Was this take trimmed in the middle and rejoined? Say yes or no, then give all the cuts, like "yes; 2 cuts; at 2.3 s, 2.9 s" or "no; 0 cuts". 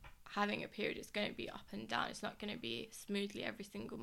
no; 0 cuts